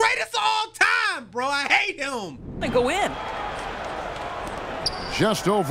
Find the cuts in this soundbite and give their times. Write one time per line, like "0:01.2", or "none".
0:02.6

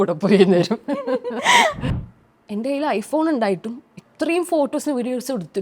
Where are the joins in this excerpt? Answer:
0:01.9

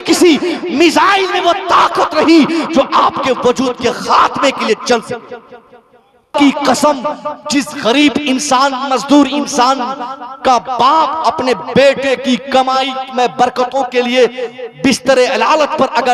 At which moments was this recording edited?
0:06.3

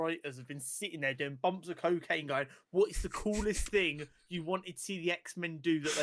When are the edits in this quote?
none

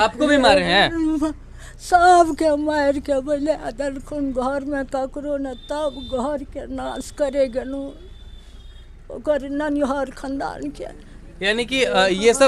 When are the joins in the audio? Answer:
none

